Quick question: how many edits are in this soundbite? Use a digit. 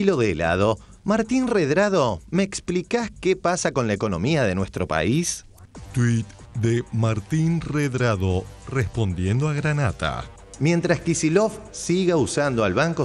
0